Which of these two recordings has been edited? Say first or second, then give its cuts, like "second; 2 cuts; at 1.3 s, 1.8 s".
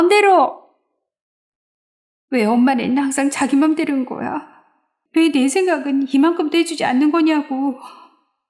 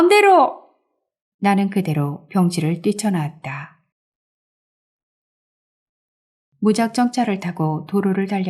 first; 1 cut; at 1.2 s